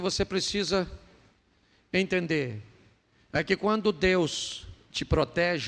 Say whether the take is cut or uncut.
uncut